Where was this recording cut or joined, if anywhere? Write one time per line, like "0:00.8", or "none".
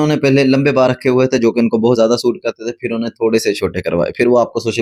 none

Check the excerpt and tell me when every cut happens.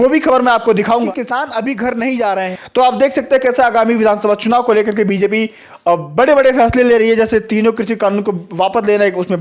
0:01.1
0:02.4

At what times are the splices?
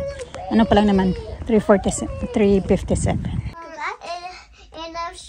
0:03.6

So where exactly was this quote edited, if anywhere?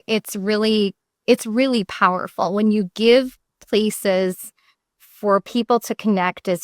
0:01.1

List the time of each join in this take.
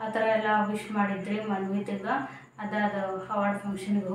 none

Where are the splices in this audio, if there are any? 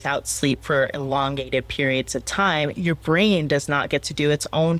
none

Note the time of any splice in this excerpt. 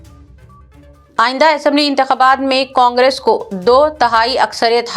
0:00.9

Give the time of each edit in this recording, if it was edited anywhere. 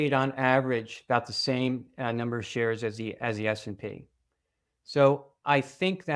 none

